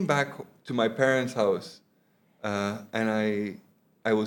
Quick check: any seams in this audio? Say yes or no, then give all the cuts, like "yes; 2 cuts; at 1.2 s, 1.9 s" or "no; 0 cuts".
no; 0 cuts